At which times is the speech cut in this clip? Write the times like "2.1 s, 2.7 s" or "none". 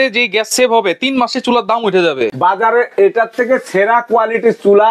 2.3 s